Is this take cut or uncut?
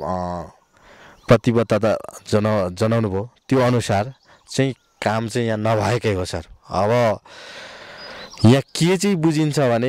uncut